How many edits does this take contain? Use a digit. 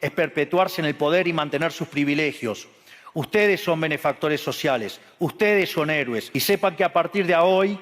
1